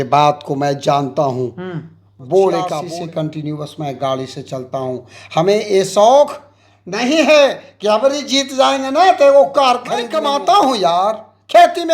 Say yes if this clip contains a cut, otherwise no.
yes